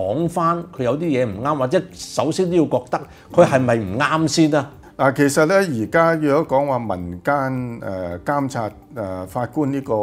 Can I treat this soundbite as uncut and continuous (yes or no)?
yes